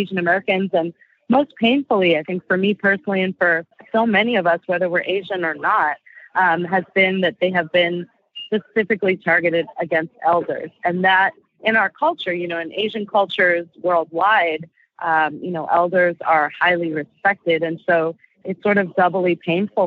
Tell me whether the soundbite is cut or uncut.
cut